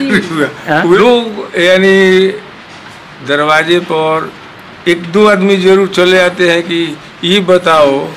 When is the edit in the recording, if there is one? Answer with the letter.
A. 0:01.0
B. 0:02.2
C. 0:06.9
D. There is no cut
A